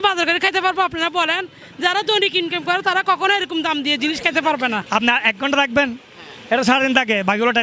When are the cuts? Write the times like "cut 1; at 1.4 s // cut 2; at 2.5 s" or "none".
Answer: cut 1; at 4.8 s